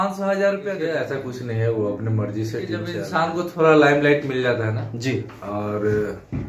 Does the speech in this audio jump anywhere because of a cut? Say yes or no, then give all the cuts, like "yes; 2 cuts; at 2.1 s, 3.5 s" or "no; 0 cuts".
yes; 2 cuts; at 1.1 s, 3.0 s